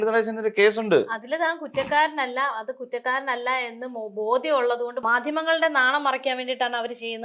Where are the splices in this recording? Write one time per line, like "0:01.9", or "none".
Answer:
0:05.0